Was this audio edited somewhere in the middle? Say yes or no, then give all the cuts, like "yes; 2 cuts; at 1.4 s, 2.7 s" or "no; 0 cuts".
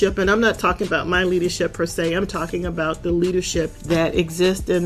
yes; 1 cut; at 3.8 s